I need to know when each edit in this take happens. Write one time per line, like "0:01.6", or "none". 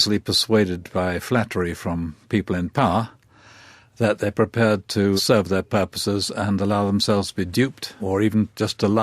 0:05.2
0:07.9